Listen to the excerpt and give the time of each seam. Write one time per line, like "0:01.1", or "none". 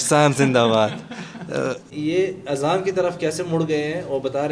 0:01.9